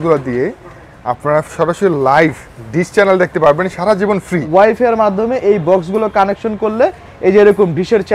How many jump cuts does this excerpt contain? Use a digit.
1